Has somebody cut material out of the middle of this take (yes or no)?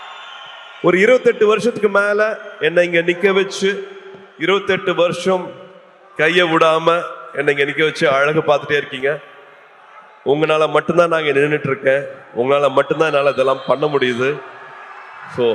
no